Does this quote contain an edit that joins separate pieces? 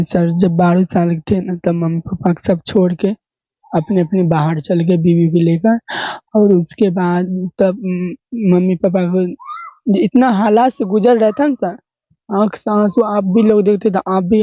no; 0 cuts

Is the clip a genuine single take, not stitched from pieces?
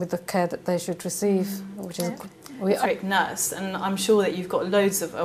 yes; 0 cuts

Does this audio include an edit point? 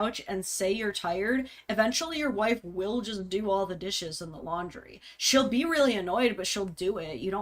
no; 0 cuts

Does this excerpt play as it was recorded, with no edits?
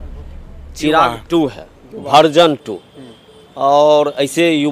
yes; 0 cuts

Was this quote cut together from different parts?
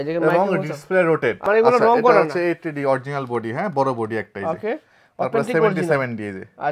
yes; 1 cut; at 1.4 s

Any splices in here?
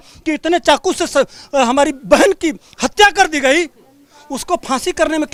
no; 0 cuts

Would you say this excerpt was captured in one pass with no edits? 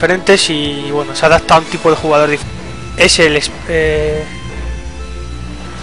yes; 0 cuts

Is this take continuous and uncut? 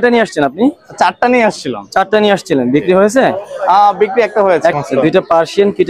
no; 1 cut; at 4.8 s

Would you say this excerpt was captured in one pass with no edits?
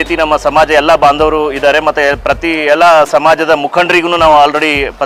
yes; 0 cuts

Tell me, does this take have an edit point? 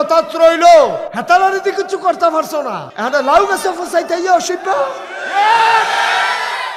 yes; 2 cuts; at 1.1 s, 2.8 s

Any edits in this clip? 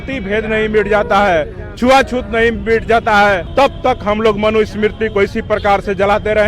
yes; 1 cut; at 3.4 s

